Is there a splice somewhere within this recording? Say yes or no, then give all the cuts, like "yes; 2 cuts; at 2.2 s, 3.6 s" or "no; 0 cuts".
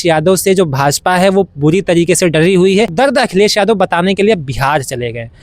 yes; 1 cut; at 2.9 s